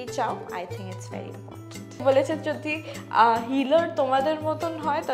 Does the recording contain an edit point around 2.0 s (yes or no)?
yes